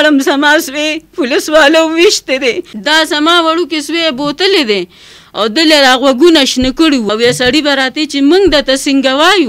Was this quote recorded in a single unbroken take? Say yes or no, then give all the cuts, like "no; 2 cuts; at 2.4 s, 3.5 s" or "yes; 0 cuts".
no; 2 cuts; at 2.7 s, 7.1 s